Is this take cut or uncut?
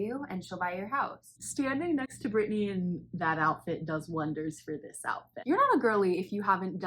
cut